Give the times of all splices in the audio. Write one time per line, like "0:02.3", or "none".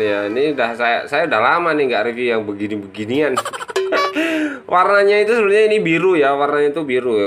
none